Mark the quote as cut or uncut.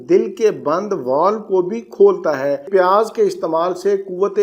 cut